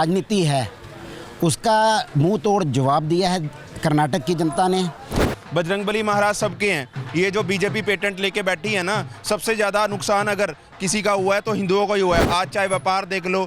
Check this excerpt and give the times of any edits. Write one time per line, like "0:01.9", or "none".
0:05.3